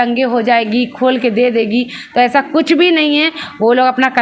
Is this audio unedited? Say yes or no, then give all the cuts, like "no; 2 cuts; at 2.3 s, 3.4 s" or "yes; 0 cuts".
yes; 0 cuts